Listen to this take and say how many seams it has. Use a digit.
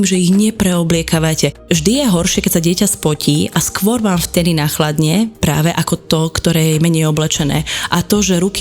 1